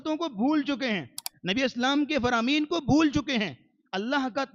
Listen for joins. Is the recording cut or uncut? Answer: uncut